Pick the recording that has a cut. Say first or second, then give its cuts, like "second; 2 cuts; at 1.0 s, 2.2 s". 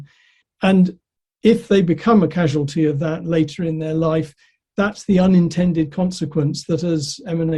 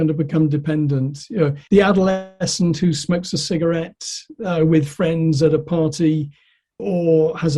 second; 1 cut; at 1.6 s